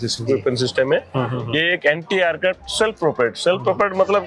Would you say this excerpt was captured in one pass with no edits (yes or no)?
yes